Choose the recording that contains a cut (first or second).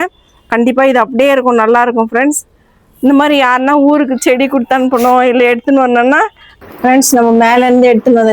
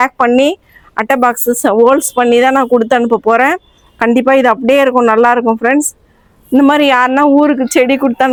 first